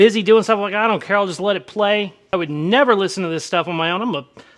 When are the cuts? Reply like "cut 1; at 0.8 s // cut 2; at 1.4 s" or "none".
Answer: cut 1; at 2.2 s